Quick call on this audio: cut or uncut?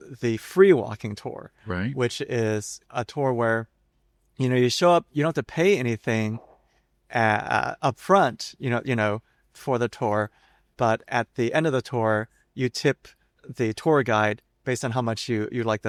uncut